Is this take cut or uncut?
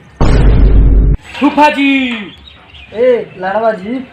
cut